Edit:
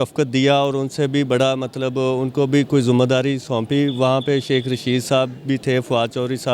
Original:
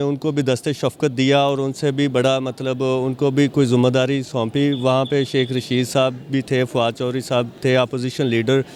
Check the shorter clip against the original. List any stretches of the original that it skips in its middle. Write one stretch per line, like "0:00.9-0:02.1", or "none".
none